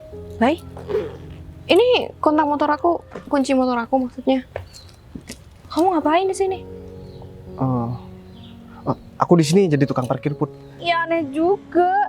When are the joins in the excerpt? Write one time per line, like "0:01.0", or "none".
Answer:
0:10.8